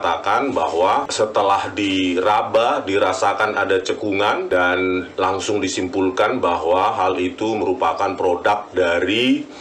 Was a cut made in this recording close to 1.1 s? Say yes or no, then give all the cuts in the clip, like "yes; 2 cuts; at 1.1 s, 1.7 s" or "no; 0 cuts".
yes; 2 cuts; at 1.1 s, 4.4 s